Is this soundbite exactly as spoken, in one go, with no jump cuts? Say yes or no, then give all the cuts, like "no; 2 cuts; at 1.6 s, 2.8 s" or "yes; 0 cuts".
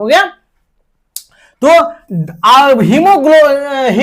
yes; 0 cuts